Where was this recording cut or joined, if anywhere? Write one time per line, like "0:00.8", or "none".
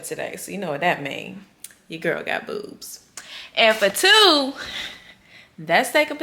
none